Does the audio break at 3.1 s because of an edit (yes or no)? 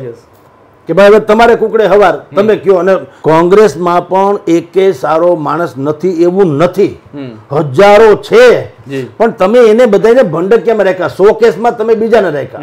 yes